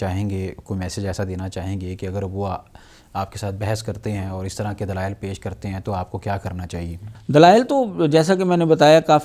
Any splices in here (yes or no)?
no